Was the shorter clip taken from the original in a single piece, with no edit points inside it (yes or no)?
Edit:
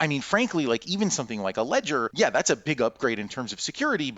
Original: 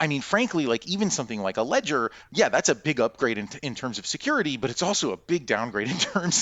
no